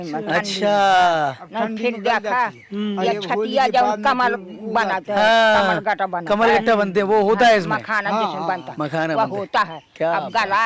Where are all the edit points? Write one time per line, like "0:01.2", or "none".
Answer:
none

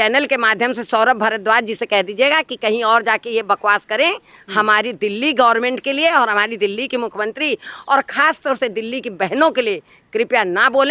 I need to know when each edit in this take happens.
none

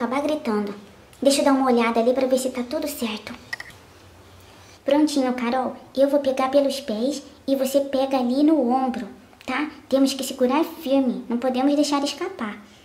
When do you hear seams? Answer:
0:07.3

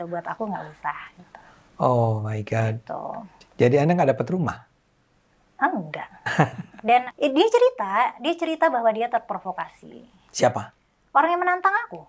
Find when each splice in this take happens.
0:07.1

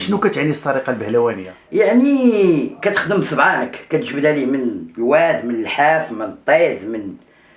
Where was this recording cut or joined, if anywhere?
0:01.5

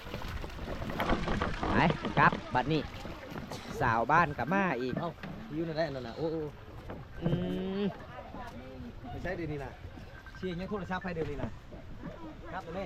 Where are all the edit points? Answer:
none

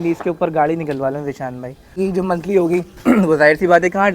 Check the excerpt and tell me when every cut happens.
0:02.0

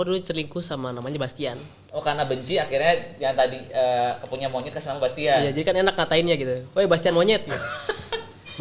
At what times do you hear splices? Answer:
none

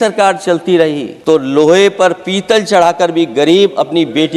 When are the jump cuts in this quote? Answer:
0:01.1

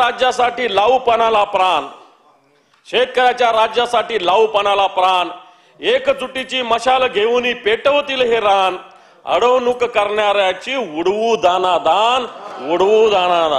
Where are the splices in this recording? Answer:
none

